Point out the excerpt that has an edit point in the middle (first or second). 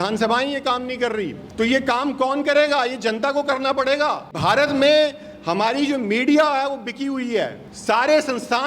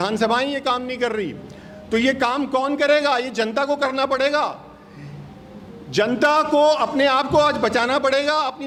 first